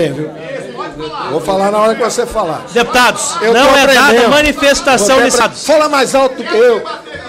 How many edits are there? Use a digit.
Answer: 1